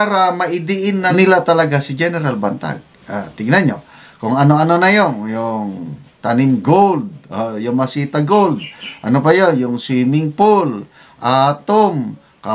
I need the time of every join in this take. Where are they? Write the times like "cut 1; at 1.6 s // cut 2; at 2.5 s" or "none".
cut 1; at 1.1 s